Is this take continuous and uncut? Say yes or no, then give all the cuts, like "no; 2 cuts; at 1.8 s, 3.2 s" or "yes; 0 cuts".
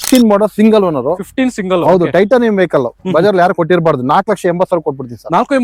yes; 0 cuts